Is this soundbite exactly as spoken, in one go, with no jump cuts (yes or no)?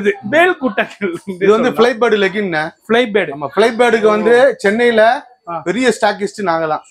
yes